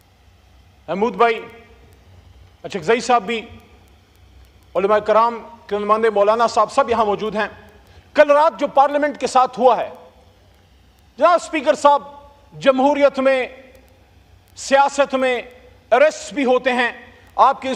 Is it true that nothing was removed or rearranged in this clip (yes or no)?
yes